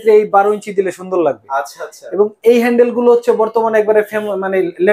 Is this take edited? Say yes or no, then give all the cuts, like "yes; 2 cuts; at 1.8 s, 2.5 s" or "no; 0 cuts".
no; 0 cuts